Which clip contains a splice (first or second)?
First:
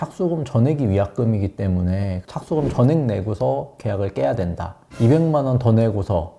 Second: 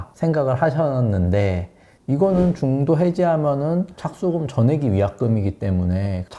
second